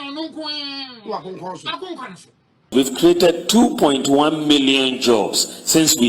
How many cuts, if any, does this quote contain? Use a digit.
1